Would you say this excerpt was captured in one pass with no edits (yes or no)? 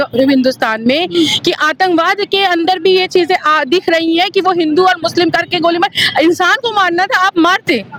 yes